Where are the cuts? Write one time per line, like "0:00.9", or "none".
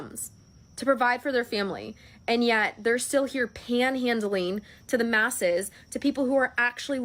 none